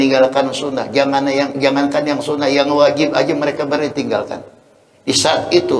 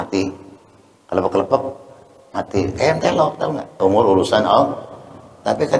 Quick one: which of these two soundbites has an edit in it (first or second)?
second